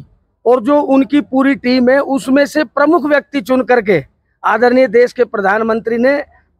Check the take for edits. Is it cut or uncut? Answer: uncut